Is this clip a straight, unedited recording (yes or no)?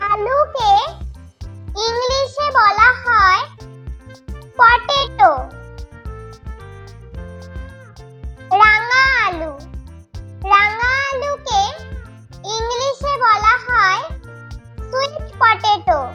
yes